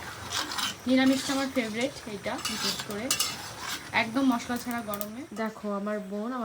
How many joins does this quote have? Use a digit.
1